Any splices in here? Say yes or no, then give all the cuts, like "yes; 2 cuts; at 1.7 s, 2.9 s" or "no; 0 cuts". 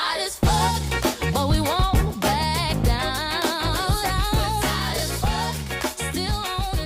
no; 0 cuts